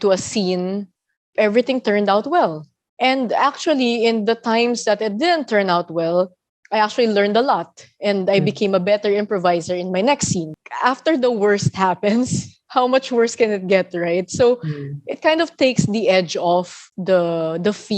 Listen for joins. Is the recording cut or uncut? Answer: cut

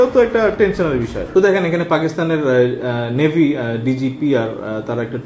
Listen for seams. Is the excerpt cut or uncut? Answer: cut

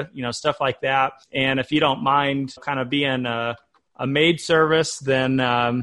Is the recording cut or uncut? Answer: cut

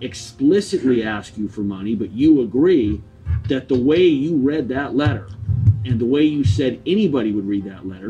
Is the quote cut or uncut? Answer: uncut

